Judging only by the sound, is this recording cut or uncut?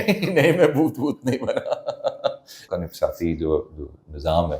cut